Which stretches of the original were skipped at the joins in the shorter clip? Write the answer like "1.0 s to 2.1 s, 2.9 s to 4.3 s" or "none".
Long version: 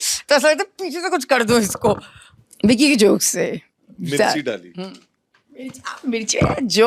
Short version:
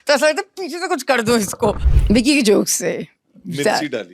2.1 s to 2.4 s